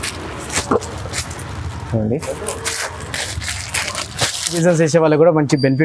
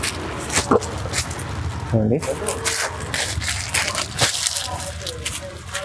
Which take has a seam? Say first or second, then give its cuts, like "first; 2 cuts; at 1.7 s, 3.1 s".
first; 1 cut; at 4.6 s